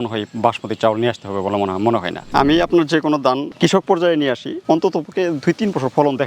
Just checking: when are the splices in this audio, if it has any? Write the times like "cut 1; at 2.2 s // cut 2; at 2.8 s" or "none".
cut 1; at 2.2 s